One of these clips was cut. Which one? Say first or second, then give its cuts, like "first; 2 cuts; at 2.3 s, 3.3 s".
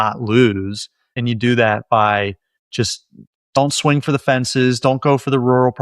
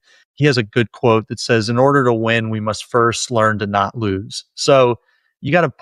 first; 1 cut; at 1.2 s